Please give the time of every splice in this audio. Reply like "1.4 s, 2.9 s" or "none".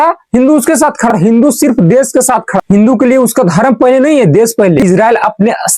1.1 s, 4.8 s